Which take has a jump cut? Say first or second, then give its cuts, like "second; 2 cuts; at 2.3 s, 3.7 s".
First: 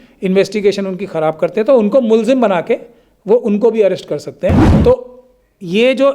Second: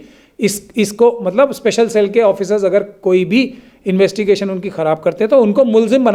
first; 1 cut; at 4.7 s